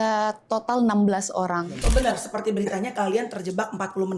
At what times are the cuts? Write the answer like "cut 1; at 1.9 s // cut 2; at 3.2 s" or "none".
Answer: cut 1; at 1.8 s